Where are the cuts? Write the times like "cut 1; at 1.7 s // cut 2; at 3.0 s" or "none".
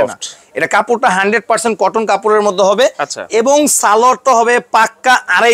none